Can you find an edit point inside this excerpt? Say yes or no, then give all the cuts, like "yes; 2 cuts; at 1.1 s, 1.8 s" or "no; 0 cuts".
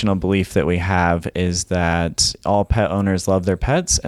no; 0 cuts